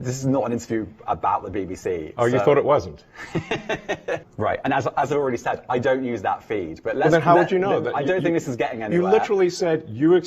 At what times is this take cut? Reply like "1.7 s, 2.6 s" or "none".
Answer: 4.3 s